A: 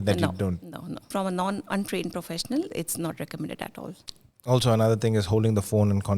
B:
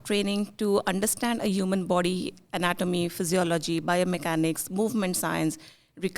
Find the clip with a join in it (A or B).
A